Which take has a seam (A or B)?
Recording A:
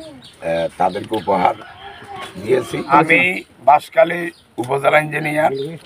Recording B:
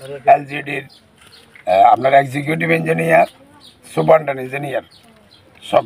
A